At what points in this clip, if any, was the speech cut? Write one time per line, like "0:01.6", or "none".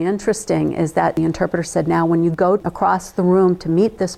0:01.2
0:02.7